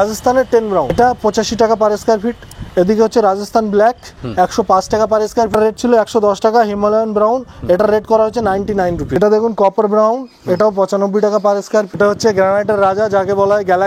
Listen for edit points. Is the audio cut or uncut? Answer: cut